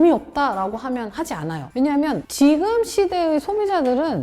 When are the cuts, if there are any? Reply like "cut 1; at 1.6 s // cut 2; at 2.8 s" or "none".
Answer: none